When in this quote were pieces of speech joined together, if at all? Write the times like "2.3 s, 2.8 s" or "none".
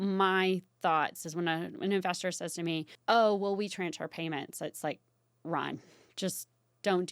2.9 s

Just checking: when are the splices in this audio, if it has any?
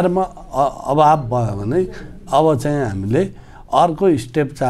none

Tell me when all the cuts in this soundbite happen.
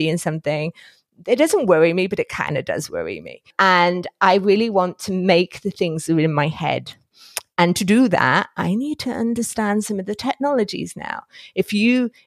3.5 s

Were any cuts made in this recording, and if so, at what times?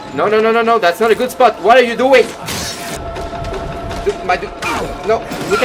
2.9 s

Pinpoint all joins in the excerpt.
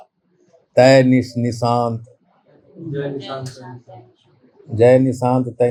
none

